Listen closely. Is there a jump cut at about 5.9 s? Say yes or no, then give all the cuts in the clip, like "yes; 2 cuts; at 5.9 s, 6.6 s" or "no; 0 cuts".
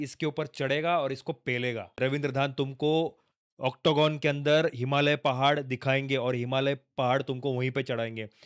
no; 1 cut; at 2.0 s